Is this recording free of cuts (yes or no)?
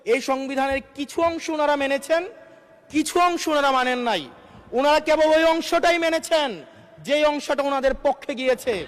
yes